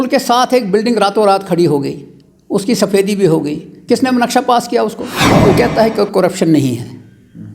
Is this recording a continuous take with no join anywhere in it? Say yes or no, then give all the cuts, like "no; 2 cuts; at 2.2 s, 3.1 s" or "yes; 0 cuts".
no; 1 cut; at 5.2 s